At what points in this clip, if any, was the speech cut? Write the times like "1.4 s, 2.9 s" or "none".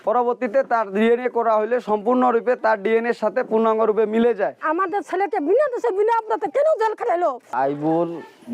7.5 s